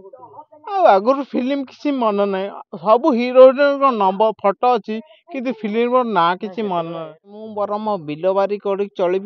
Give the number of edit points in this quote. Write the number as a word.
one